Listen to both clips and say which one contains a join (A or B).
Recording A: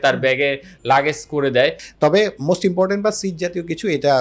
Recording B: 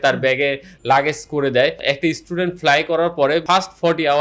A